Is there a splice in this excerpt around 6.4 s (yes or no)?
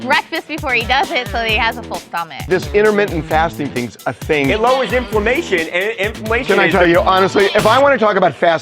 yes